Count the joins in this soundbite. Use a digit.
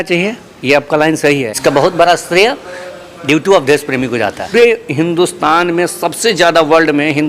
2